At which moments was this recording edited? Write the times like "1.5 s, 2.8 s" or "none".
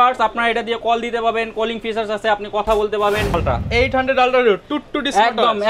3.3 s